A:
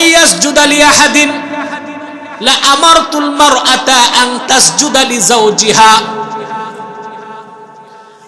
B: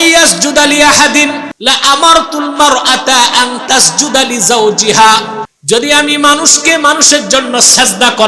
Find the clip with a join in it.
B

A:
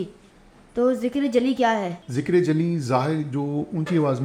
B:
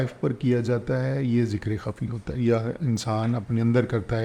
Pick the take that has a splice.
A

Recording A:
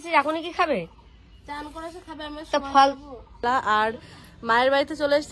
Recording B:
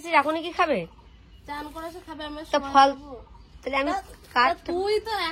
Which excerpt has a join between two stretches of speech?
A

